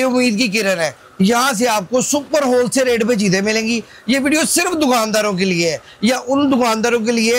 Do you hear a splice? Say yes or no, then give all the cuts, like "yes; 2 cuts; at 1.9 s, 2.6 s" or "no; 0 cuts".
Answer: no; 0 cuts